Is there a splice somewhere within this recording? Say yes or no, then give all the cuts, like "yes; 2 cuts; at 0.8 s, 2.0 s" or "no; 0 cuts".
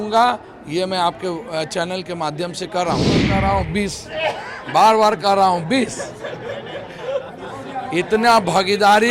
yes; 1 cut; at 3.3 s